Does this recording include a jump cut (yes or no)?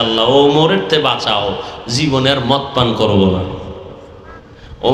no